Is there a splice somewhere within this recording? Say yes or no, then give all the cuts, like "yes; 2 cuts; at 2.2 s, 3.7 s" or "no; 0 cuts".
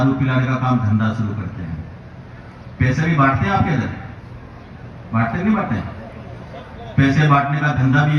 no; 0 cuts